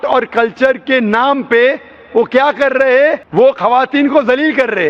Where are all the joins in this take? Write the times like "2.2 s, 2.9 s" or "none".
3.2 s